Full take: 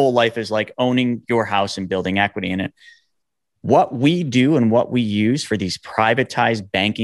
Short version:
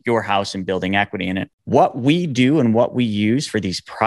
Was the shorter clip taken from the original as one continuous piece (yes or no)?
no